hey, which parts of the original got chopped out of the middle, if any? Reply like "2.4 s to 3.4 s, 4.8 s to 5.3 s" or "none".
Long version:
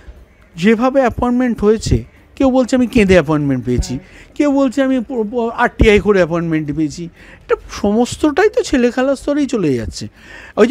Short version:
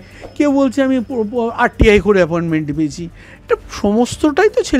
none